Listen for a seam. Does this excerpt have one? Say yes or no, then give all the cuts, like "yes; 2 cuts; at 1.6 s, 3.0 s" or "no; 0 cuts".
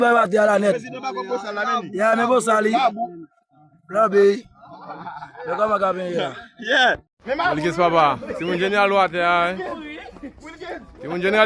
yes; 1 cut; at 7.1 s